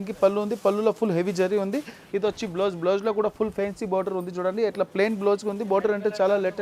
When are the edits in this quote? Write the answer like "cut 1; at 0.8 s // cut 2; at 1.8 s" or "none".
none